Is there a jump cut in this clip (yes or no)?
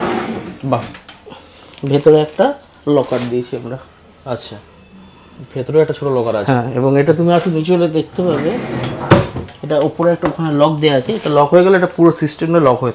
no